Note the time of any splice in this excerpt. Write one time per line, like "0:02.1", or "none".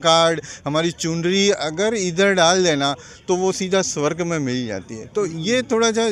none

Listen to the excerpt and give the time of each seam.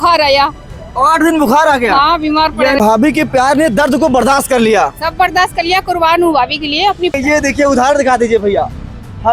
0:02.8
0:07.1

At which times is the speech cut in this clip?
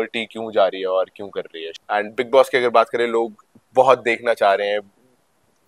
0:01.6

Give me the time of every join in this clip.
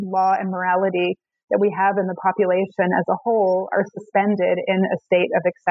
none

